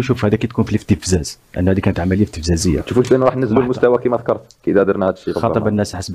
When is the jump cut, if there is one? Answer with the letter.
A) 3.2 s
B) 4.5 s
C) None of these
C